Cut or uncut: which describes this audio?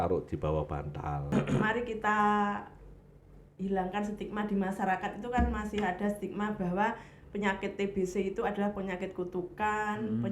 cut